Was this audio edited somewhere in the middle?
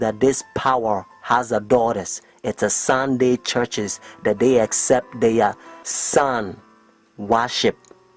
yes; 1 cut; at 6.4 s

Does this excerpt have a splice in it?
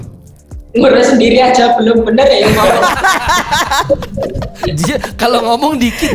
no; 0 cuts

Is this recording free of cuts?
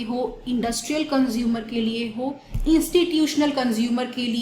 yes; 0 cuts

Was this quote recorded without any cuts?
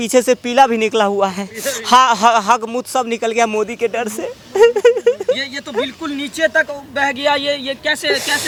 yes; 0 cuts

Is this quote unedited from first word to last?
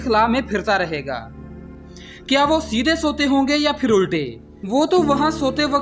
no; 1 cut; at 1.7 s

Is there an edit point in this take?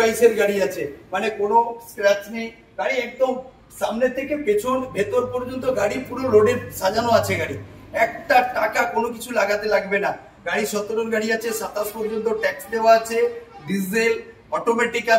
no; 0 cuts

